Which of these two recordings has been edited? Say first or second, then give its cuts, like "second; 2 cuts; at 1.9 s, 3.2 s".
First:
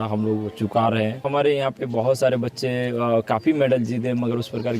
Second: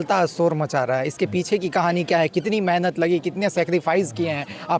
first; 1 cut; at 1.2 s